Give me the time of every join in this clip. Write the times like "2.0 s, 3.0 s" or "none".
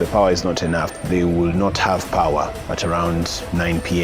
0.9 s